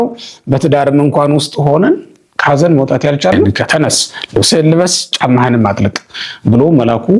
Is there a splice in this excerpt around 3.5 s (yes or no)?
yes